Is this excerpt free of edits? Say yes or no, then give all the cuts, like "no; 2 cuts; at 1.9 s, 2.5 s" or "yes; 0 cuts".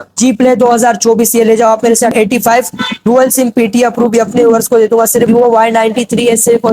no; 2 cuts; at 2.1 s, 5.3 s